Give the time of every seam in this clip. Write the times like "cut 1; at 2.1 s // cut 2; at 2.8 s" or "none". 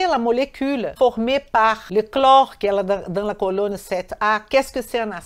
cut 1; at 0.9 s // cut 2; at 1.8 s